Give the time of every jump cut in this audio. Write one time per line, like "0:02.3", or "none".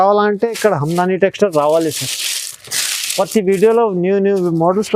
none